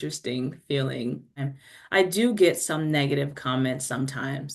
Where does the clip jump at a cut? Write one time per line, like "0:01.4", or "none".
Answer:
0:01.5